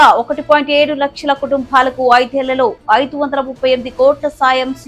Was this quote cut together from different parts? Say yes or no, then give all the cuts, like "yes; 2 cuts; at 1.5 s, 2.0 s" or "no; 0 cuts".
no; 0 cuts